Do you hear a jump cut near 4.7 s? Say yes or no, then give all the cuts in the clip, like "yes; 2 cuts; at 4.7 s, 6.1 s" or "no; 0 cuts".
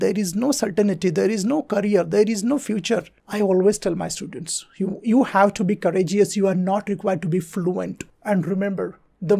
no; 2 cuts; at 3.2 s, 8.1 s